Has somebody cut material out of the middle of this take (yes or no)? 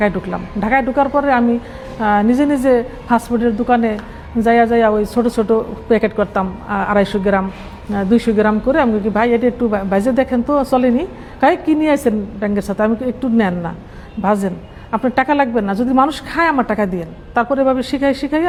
no